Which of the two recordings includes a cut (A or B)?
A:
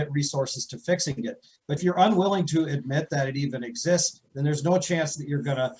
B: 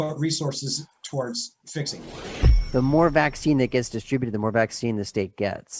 B